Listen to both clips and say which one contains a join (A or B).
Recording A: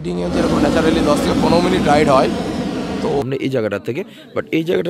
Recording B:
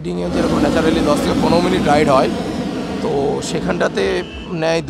A